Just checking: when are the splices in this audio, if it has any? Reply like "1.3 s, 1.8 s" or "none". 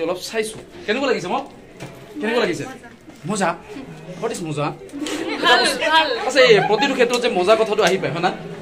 none

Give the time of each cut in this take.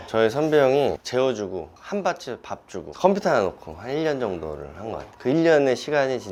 none

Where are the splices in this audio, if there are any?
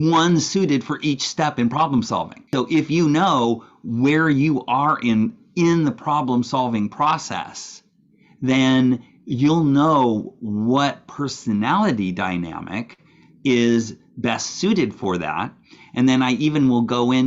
2.4 s

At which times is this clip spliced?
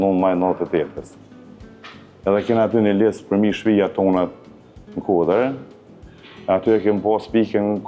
none

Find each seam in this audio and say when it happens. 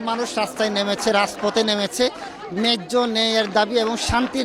none

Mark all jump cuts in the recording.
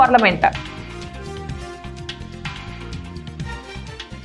1.1 s

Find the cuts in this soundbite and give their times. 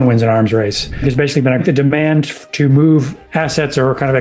1.2 s, 3.2 s

